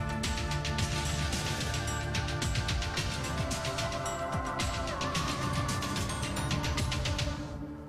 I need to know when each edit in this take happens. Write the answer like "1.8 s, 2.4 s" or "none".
none